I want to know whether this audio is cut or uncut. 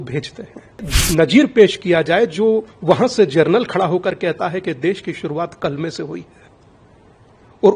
cut